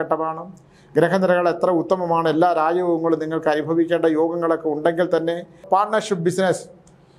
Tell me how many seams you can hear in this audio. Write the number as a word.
one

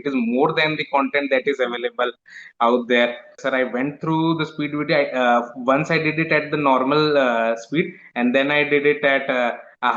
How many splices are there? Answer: one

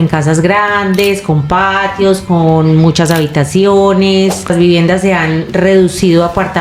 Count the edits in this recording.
one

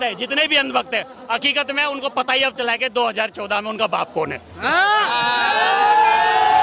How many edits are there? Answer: zero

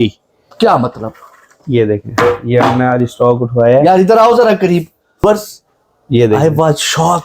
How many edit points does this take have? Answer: one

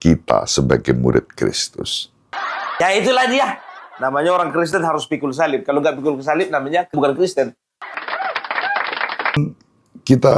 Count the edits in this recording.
one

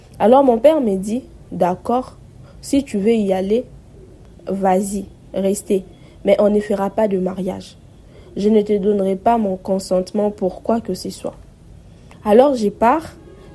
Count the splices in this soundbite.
zero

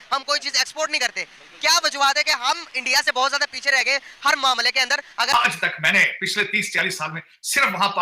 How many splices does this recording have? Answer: one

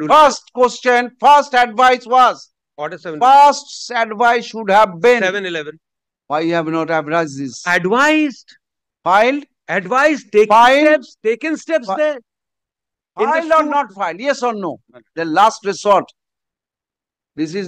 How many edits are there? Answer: one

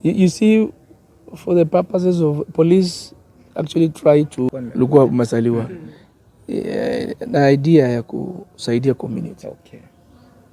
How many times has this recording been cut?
one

